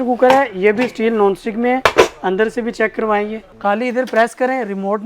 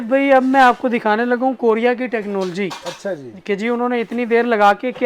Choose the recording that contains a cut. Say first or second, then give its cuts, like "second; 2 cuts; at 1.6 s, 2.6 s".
first; 1 cut; at 3.4 s